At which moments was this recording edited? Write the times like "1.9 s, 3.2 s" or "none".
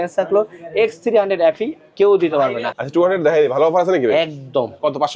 2.7 s